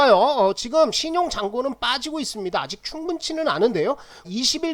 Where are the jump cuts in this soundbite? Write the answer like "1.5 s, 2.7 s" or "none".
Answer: none